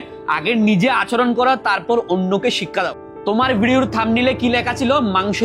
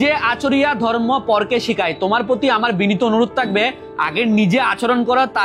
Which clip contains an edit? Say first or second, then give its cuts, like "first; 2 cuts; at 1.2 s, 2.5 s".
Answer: first; 1 cut; at 3.0 s